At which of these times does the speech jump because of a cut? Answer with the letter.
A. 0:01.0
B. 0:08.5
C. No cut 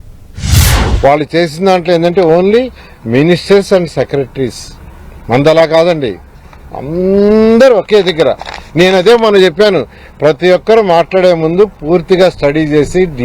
A